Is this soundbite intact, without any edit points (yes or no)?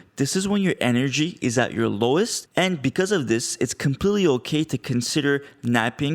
no